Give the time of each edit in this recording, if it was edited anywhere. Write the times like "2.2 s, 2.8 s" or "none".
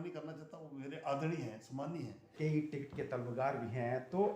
2.2 s